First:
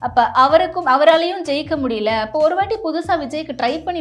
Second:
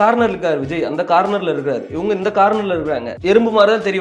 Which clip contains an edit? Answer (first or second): second